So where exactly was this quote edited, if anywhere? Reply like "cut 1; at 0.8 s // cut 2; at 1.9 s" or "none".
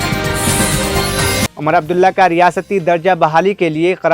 cut 1; at 1.5 s